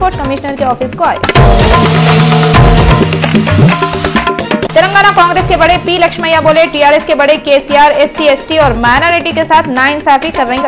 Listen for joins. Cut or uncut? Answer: uncut